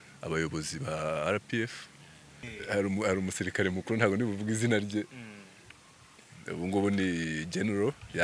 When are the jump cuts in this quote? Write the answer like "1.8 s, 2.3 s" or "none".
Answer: 2.5 s